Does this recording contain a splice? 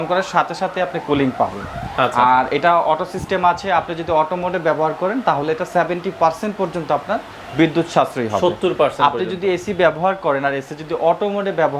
no; 0 cuts

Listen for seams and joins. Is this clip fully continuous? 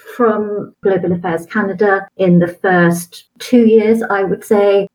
yes; 0 cuts

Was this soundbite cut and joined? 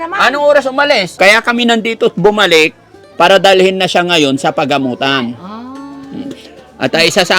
yes; 1 cut; at 1.1 s

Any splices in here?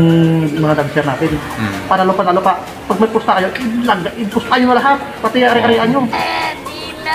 yes; 1 cut; at 6.1 s

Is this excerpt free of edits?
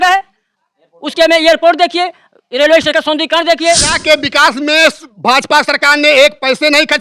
no; 1 cut; at 3.9 s

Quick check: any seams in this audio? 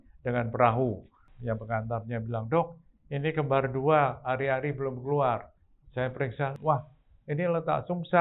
yes; 2 cuts; at 1.3 s, 6.5 s

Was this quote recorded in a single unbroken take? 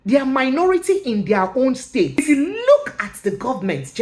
no; 1 cut; at 2.1 s

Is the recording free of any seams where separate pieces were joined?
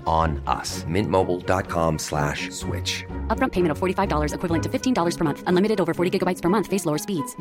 yes; 0 cuts

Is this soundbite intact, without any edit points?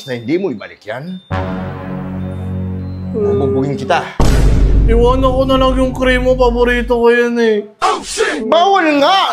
yes; 0 cuts

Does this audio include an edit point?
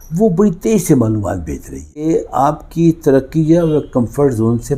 yes; 1 cut; at 2.0 s

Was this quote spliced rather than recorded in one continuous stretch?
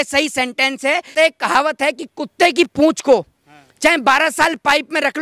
yes; 1 cut; at 1.1 s

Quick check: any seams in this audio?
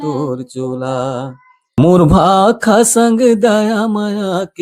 yes; 1 cut; at 1.8 s

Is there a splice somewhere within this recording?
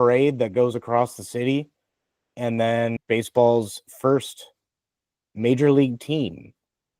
yes; 1 cut; at 3.0 s

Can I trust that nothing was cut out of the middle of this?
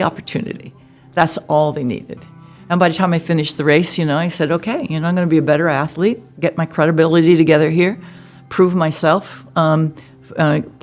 yes; 0 cuts

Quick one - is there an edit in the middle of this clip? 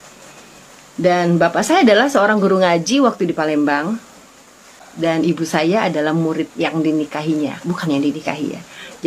no; 0 cuts

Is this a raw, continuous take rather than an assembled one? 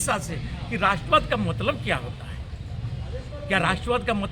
yes; 0 cuts

